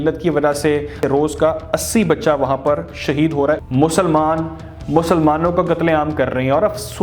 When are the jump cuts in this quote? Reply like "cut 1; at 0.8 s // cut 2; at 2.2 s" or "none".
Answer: cut 1; at 1.0 s // cut 2; at 3.6 s